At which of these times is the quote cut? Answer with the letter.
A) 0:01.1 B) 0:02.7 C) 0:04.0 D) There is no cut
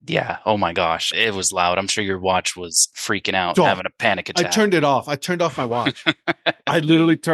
A